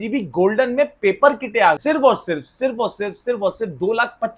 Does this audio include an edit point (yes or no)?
yes